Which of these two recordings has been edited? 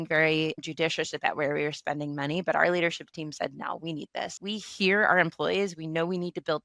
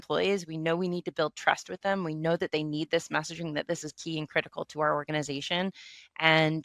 first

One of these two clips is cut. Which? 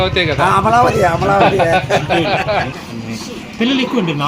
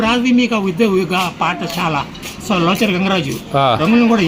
first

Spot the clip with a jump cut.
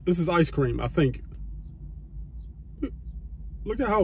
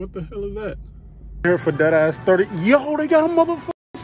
second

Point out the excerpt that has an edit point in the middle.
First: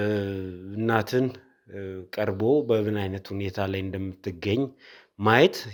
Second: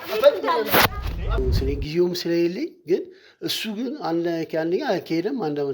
second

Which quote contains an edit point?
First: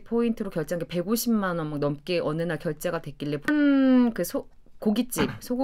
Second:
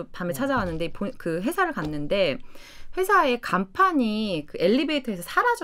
first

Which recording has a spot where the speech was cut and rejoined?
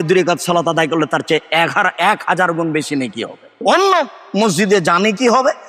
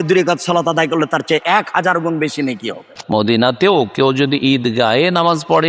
second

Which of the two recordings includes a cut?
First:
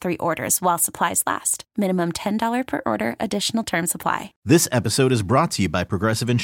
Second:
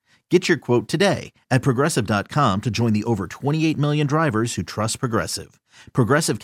first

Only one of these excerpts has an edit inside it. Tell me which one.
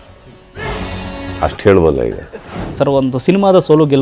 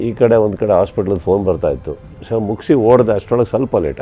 first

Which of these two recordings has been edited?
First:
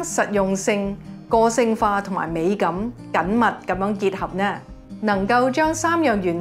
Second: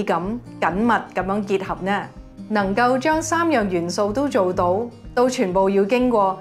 second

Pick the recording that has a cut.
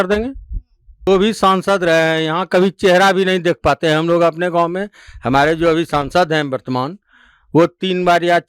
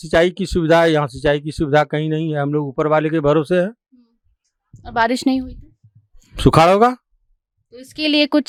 first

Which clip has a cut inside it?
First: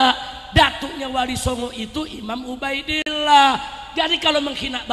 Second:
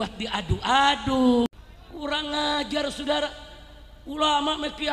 second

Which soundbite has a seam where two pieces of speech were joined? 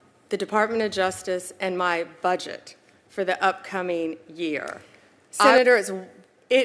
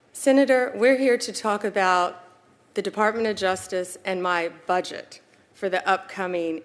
first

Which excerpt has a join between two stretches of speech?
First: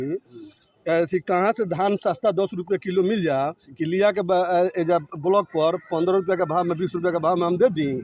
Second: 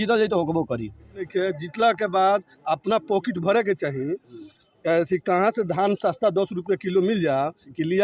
second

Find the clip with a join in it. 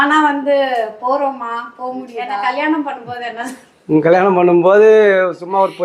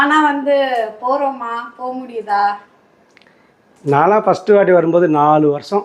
first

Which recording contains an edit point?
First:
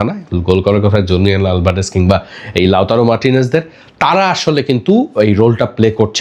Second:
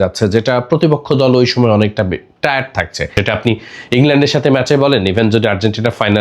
second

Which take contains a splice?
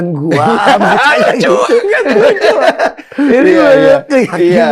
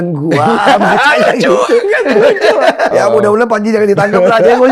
second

